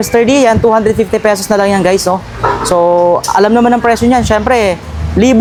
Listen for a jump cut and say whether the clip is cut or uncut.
uncut